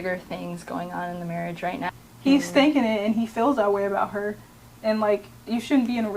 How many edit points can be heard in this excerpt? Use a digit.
1